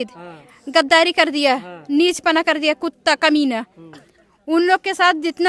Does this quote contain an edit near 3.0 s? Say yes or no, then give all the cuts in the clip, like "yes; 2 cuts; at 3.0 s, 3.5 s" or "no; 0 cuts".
no; 0 cuts